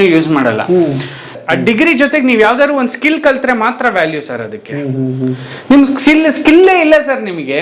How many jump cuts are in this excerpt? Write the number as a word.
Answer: one